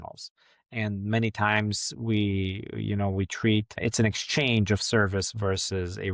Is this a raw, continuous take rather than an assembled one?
yes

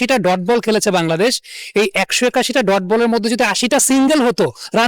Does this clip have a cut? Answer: no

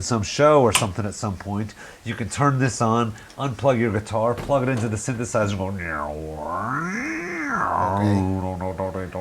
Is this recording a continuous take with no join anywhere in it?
yes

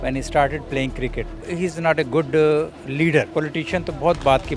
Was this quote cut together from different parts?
yes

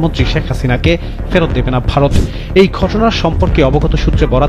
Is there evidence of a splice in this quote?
no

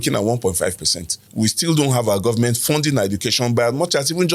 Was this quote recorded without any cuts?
no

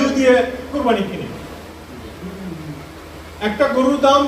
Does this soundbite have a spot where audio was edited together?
no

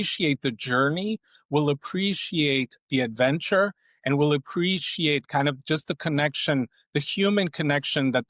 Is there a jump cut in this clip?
no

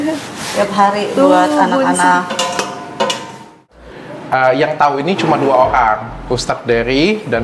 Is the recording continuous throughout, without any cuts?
no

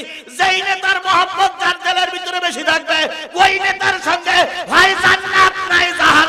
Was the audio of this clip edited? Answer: no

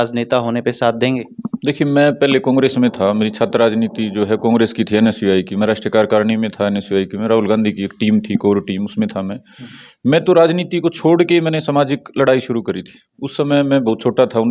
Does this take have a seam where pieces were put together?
no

